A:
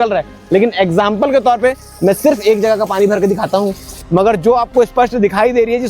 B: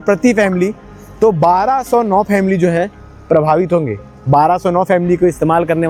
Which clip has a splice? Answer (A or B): A